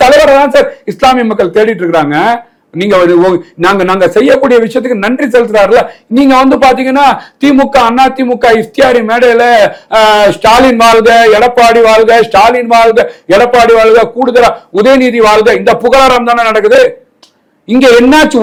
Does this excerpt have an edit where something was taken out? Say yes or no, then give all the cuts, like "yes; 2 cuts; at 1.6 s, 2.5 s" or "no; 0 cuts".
no; 0 cuts